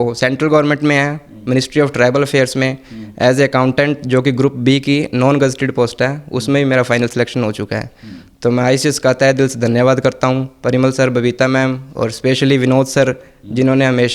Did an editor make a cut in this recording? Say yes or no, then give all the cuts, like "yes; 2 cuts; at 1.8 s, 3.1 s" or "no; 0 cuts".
no; 0 cuts